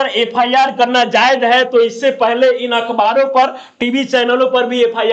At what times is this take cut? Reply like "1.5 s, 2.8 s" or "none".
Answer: none